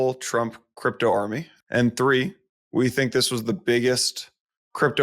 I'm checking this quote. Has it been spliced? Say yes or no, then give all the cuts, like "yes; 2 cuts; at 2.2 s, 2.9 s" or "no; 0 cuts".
yes; 1 cut; at 1.5 s